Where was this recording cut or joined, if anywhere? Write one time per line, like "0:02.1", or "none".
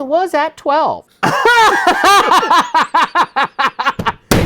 0:01.1